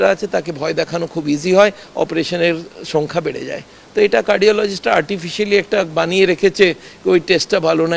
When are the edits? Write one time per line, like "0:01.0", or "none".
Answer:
none